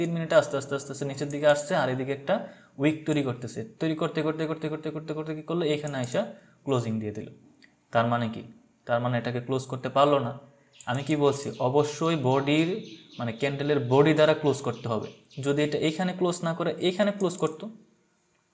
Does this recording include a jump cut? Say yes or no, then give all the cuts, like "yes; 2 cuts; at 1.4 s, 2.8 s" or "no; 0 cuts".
no; 0 cuts